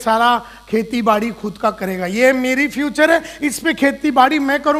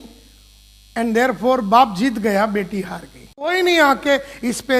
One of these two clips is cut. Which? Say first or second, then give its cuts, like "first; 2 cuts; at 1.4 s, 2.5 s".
second; 1 cut; at 3.5 s